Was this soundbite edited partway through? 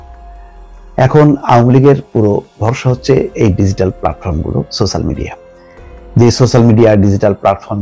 no; 0 cuts

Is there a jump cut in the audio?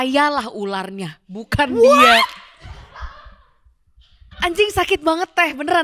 yes; 1 cut; at 4.2 s

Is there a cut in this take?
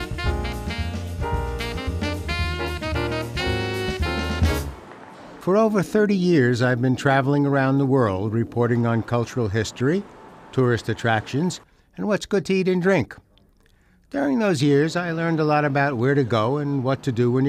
yes; 1 cut; at 3.1 s

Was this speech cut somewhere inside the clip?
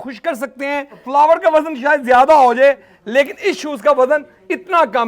yes; 1 cut; at 1.0 s

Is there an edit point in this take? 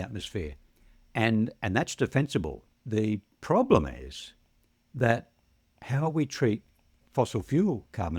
yes; 2 cuts; at 2.7 s, 7.0 s

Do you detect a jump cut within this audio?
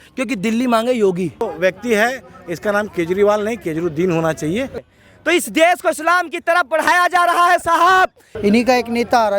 yes; 3 cuts; at 1.4 s, 4.8 s, 8.3 s

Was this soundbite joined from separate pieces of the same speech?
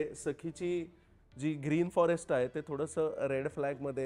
no; 0 cuts

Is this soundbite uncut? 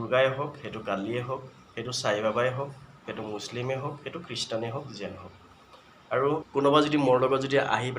no; 1 cut; at 6.4 s

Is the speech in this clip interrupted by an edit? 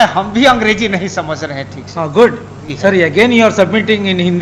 yes; 1 cut; at 2.6 s

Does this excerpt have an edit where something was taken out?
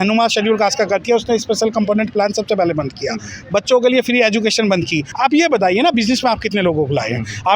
yes; 1 cut; at 5.0 s

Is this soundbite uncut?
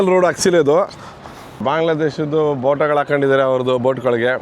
no; 1 cut; at 1.6 s

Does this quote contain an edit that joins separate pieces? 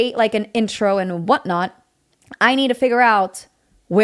no; 0 cuts

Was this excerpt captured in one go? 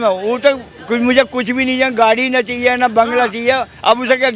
yes; 0 cuts

